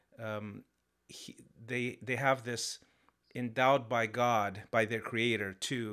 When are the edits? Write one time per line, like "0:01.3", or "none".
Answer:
none